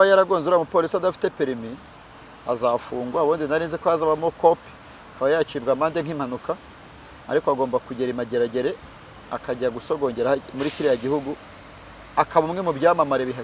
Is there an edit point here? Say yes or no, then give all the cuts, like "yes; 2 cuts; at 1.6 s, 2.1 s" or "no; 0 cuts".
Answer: no; 0 cuts